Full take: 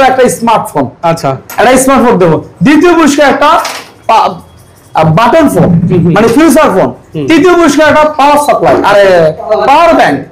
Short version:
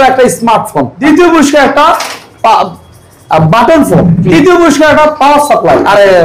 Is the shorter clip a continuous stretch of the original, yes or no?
no